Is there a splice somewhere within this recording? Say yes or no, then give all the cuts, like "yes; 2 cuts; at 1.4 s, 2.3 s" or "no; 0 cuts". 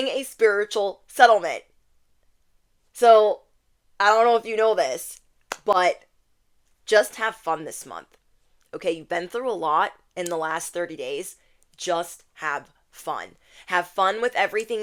no; 0 cuts